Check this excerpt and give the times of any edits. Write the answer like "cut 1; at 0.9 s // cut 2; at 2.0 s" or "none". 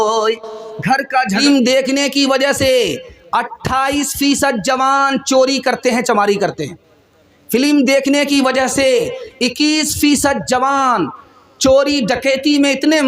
cut 1; at 1.4 s // cut 2; at 8.3 s

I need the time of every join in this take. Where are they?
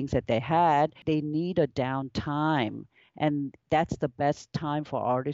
cut 1; at 1.0 s

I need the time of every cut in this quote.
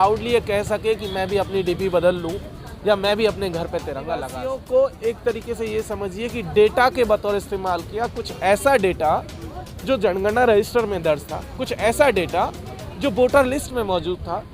cut 1; at 4.3 s

